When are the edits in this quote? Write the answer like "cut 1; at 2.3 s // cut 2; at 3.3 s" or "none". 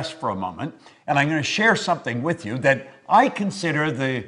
cut 1; at 2.3 s